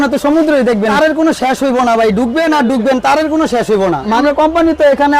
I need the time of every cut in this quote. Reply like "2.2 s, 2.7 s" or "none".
0.9 s, 4.2 s